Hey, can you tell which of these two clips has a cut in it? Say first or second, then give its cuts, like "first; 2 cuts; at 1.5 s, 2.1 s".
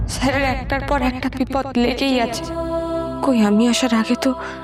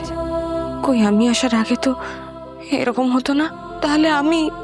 second; 1 cut; at 3.6 s